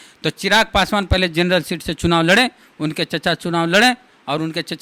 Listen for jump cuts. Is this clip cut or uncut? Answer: uncut